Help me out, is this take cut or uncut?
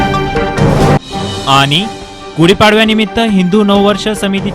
cut